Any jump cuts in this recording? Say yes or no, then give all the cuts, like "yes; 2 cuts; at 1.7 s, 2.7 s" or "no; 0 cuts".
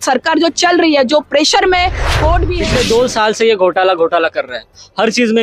yes; 1 cut; at 2.5 s